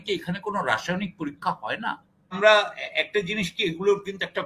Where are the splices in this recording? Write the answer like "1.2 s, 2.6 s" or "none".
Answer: 2.4 s